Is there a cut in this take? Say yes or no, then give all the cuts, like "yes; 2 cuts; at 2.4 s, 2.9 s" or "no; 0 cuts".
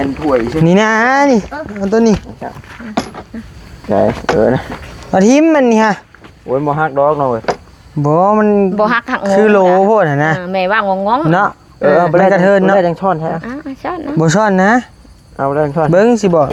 no; 0 cuts